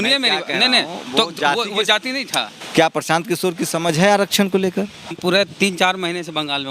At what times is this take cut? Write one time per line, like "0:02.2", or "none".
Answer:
0:02.5
0:05.2